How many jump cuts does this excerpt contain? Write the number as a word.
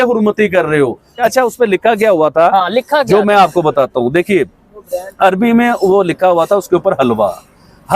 one